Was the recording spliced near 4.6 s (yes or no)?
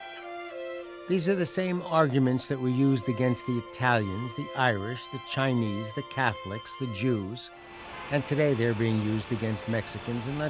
no